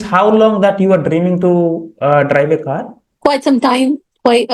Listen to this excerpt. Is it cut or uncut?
cut